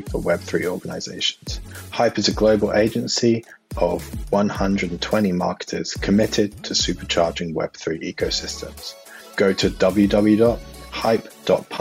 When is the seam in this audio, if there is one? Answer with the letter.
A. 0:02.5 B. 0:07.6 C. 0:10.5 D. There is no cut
D